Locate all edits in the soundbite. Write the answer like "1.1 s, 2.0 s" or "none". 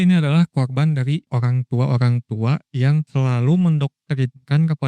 1.3 s, 3.1 s